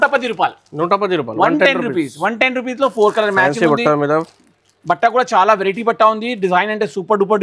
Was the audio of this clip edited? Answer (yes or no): no